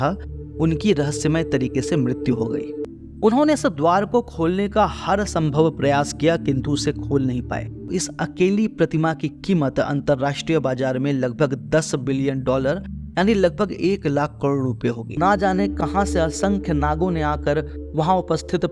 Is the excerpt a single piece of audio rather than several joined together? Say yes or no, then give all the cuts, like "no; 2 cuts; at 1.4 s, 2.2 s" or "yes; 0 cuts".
no; 3 cuts; at 2.8 s, 7.9 s, 15.2 s